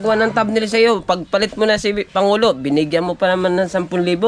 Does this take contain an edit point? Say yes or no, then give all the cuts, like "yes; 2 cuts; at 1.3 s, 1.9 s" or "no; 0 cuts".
no; 0 cuts